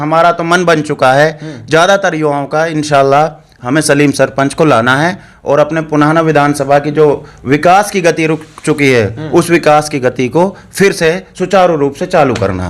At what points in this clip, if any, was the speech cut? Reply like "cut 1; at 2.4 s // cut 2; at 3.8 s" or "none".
none